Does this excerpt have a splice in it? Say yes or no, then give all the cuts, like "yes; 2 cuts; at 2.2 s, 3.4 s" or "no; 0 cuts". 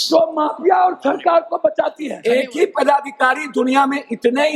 yes; 1 cut; at 2.1 s